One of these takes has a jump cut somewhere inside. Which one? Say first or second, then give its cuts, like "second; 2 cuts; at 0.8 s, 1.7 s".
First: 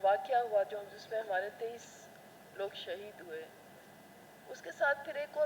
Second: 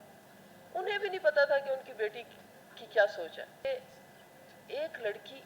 second; 1 cut; at 3.7 s